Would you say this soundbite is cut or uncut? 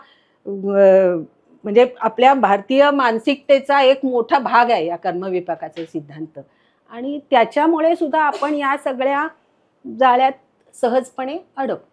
uncut